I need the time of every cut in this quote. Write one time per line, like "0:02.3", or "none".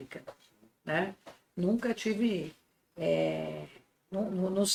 none